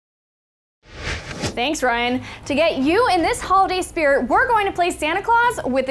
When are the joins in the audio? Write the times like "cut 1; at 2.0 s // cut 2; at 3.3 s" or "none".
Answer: cut 1; at 1.5 s